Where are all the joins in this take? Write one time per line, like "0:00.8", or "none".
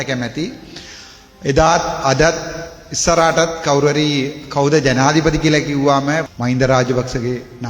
0:06.3